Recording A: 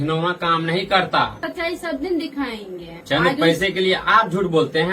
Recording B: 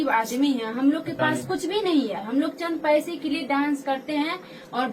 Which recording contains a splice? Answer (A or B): A